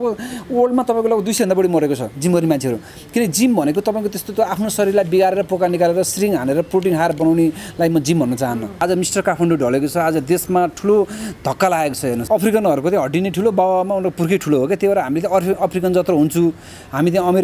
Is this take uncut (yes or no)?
no